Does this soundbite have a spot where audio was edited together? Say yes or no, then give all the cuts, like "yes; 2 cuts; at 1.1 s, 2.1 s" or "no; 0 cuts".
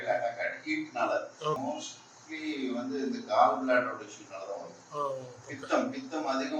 yes; 1 cut; at 1.6 s